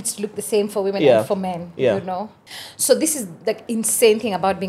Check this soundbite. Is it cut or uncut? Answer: cut